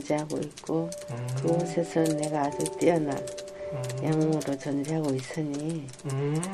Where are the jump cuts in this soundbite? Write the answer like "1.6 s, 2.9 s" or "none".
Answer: none